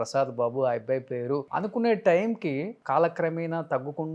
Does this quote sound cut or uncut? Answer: cut